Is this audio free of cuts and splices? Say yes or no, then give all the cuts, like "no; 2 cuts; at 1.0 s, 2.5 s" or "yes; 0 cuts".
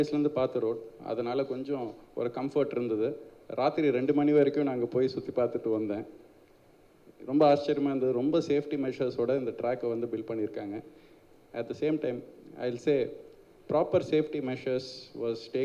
yes; 0 cuts